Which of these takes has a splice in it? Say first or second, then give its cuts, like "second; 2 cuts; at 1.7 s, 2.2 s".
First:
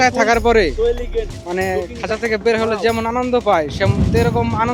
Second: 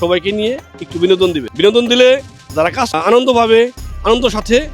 second; 2 cuts; at 1.5 s, 2.9 s